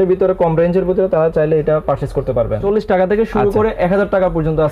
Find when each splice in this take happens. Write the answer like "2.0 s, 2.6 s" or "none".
2.6 s